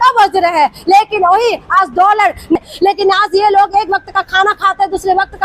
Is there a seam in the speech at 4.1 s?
no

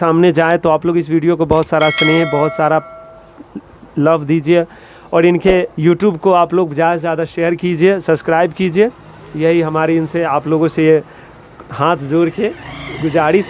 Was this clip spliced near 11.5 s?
no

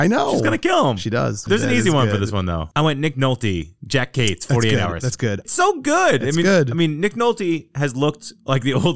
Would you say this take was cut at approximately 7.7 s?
no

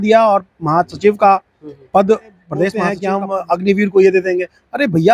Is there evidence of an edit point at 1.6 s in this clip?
no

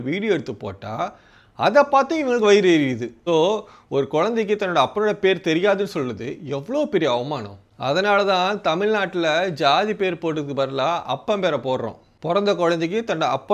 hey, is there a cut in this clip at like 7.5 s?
no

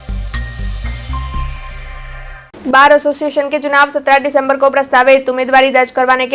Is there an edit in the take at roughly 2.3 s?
yes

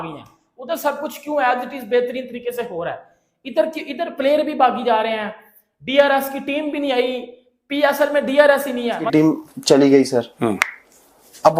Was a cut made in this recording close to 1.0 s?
no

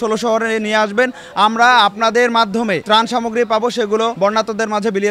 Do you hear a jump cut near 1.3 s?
no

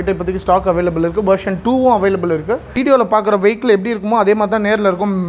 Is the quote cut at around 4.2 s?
no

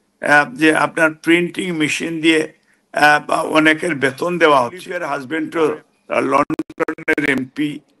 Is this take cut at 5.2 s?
yes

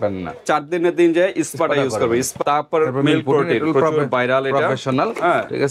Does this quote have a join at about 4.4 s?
no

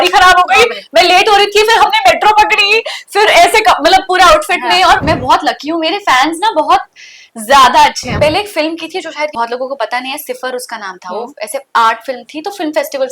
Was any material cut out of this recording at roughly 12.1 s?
no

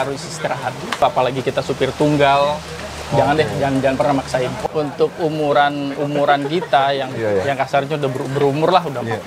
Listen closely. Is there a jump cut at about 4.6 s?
yes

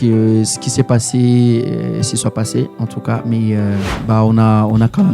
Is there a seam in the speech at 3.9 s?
yes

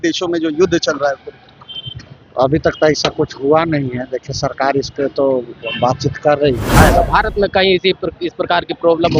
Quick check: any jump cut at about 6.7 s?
yes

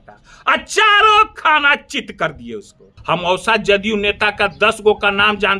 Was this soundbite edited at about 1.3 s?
no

